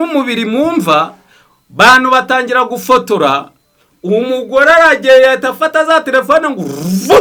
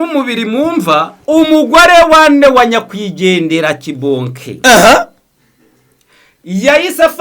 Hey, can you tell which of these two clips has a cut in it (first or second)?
second